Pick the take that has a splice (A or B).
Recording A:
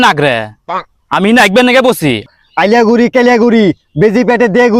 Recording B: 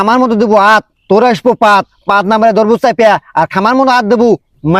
A